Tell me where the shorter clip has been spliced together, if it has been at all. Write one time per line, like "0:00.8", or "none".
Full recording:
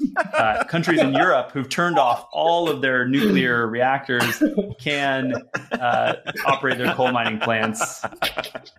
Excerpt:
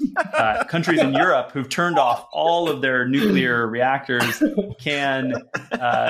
none